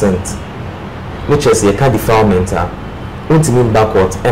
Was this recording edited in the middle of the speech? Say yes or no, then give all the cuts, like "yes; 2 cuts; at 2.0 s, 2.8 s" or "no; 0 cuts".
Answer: no; 0 cuts